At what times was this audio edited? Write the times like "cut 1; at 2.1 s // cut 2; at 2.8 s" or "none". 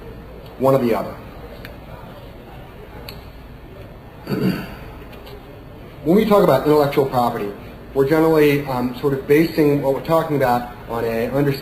cut 1; at 7.4 s